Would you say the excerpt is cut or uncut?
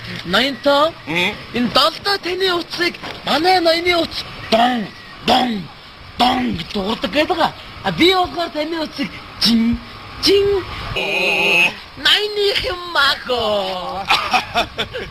uncut